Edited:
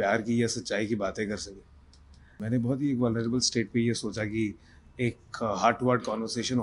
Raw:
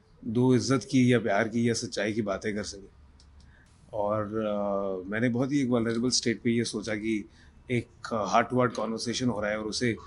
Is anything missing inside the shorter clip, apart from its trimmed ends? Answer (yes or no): yes